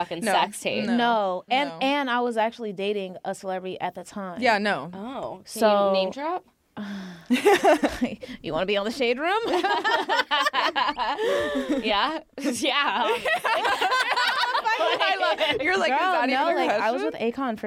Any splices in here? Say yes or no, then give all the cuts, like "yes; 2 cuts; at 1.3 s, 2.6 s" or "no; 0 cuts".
no; 0 cuts